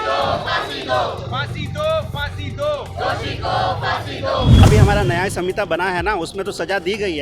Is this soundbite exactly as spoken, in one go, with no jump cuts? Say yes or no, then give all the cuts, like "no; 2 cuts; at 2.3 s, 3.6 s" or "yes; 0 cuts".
no; 1 cut; at 4.6 s